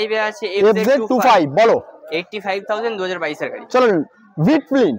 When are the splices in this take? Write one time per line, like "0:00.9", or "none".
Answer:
none